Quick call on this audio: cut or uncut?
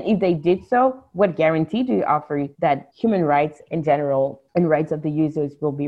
cut